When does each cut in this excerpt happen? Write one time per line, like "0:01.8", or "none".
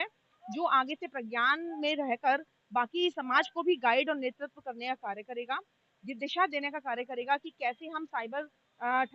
none

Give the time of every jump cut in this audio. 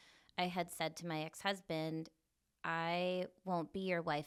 none

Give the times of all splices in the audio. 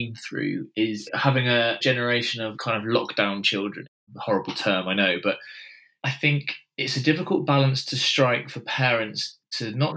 0:02.0
0:03.9

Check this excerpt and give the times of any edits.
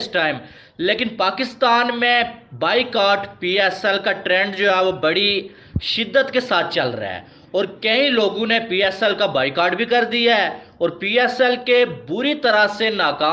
none

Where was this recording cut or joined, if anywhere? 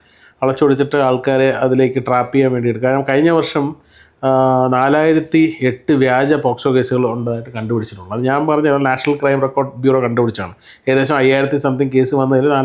none

